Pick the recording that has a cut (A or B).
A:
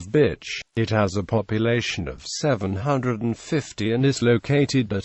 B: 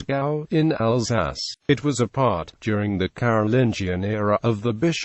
B